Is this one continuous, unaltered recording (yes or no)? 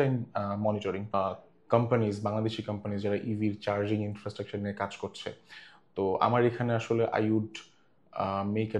no